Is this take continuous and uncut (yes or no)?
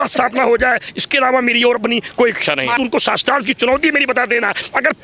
no